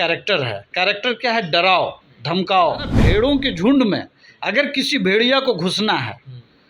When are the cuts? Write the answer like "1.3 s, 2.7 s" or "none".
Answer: 2.9 s